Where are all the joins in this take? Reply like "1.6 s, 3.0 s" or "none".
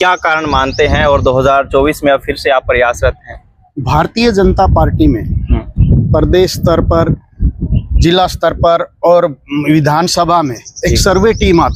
none